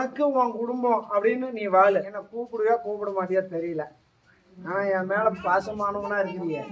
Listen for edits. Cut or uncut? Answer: cut